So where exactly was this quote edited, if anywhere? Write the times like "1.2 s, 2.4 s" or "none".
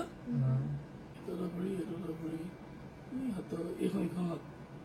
1.0 s

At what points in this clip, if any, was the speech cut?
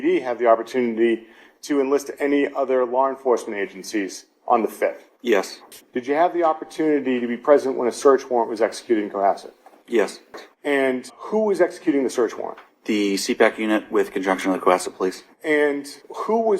5.7 s, 10.4 s

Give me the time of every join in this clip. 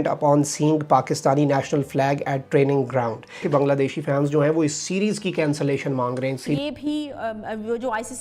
3.4 s, 6.4 s

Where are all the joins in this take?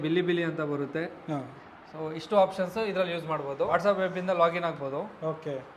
none

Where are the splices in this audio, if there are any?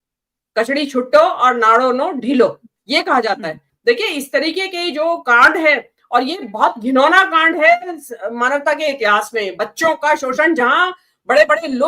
3.7 s

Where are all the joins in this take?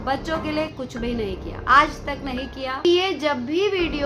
2.9 s

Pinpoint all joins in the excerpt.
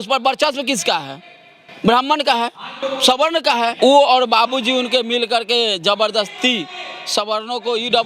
2.8 s, 3.7 s

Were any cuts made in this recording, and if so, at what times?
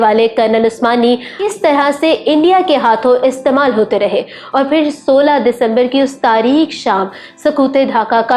1.3 s

